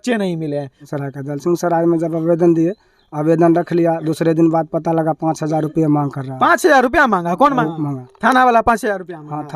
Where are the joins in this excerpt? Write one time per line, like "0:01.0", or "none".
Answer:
0:00.9
0:08.0